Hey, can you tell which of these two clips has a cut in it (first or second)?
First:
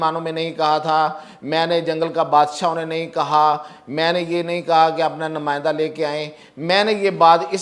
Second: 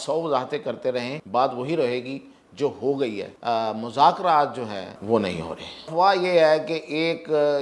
second